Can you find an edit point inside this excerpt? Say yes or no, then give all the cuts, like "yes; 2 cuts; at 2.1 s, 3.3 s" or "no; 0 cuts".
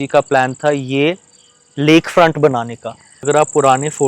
yes; 1 cut; at 3.1 s